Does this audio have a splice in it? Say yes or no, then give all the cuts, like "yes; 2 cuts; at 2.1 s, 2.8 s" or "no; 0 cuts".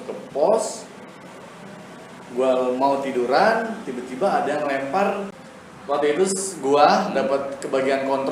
yes; 1 cut; at 5.4 s